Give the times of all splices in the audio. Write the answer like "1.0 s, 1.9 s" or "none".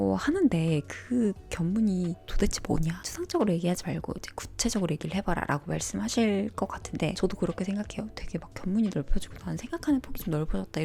none